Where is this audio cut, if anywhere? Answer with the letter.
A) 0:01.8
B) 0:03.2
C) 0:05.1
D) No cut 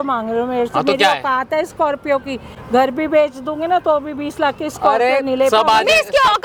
D